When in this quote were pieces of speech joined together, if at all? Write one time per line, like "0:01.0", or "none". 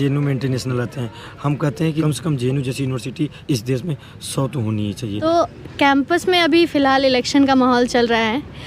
0:02.0
0:05.2